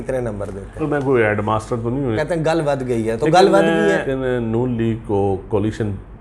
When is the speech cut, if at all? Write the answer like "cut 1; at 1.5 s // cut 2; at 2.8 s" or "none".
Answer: cut 1; at 0.8 s // cut 2; at 2.2 s // cut 3; at 4.1 s